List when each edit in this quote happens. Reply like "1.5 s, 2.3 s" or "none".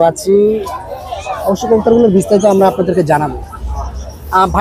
none